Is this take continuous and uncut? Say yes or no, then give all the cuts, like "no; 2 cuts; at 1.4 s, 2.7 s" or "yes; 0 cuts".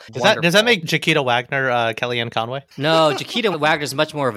no; 3 cuts; at 0.8 s, 2.7 s, 3.5 s